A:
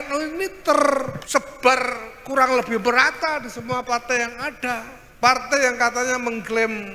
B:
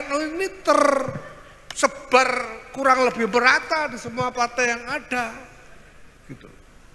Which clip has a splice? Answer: A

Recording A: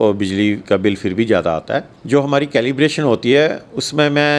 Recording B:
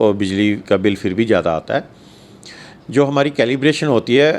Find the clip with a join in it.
A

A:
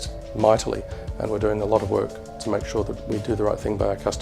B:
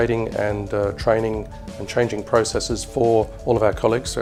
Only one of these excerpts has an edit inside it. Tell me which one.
A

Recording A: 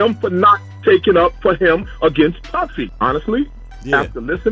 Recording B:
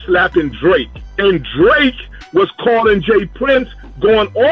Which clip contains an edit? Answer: A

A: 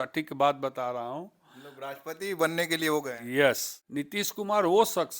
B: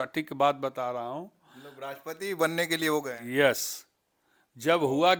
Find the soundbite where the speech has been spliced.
A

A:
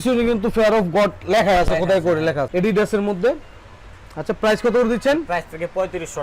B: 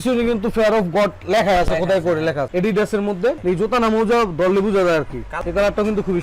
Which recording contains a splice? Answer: B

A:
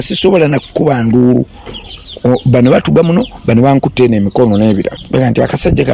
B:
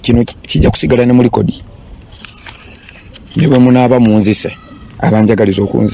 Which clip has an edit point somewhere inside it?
A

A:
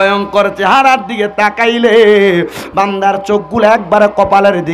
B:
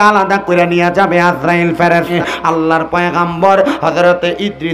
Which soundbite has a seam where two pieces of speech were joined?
B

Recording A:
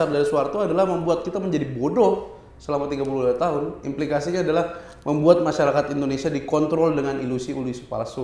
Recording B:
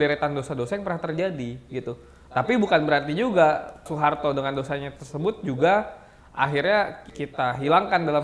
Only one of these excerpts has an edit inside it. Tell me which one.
B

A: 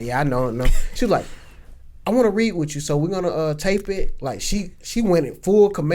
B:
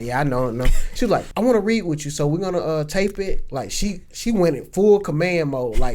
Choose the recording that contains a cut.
B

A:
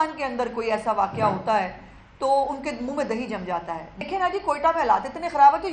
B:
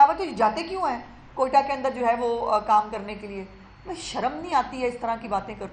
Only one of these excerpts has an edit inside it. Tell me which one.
A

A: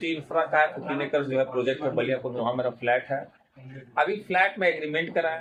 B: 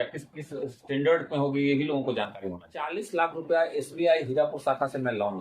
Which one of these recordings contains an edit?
B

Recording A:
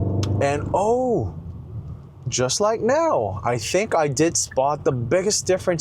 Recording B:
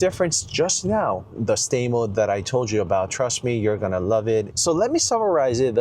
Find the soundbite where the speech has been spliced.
B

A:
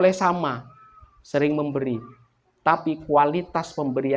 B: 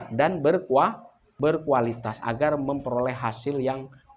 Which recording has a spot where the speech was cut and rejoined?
B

